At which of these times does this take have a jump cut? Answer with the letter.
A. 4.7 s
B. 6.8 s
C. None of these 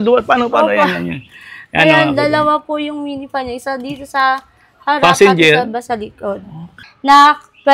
B